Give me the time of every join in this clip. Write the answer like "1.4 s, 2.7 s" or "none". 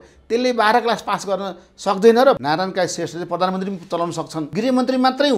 2.4 s, 4.4 s